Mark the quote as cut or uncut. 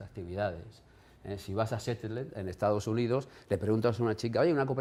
uncut